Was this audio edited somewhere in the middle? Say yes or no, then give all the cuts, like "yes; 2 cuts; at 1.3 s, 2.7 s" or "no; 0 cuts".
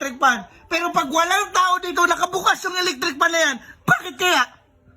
no; 0 cuts